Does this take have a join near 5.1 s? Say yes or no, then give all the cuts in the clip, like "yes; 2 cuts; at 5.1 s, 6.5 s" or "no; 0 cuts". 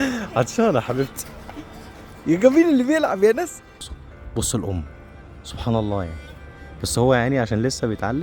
no; 1 cut; at 3.6 s